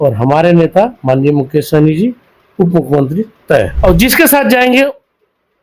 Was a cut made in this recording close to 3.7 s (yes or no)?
yes